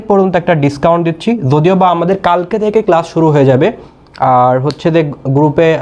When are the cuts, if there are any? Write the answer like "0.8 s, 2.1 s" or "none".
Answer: none